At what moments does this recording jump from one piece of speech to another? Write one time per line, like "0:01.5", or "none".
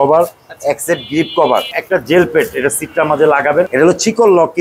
0:01.8
0:03.7

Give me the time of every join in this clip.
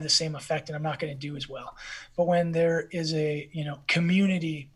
none

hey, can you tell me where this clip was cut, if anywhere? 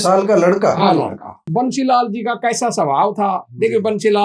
0:01.5

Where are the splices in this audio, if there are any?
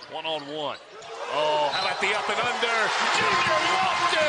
none

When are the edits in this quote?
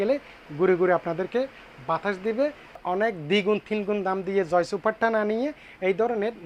0:02.7

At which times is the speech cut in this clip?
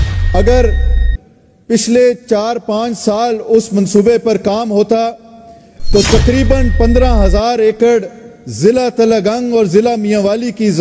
none

